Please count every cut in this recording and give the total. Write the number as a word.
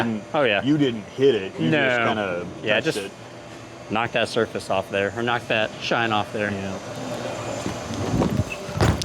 one